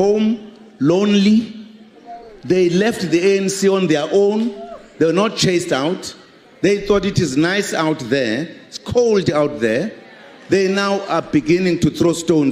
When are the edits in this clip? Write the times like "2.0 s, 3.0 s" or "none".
10.4 s